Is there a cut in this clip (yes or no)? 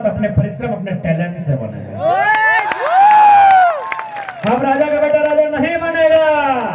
no